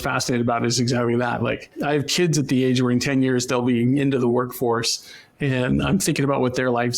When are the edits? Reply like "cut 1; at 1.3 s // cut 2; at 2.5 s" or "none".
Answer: cut 1; at 1.7 s